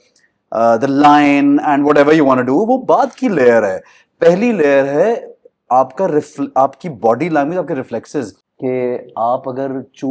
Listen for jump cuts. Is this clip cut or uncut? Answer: cut